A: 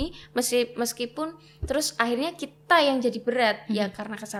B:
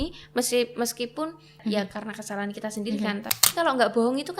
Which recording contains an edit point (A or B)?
B